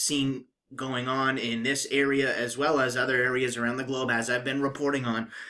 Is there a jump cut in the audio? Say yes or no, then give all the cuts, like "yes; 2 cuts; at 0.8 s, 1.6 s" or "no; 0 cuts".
yes; 1 cut; at 2.0 s